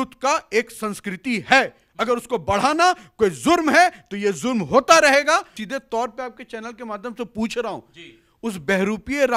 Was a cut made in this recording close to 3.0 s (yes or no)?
no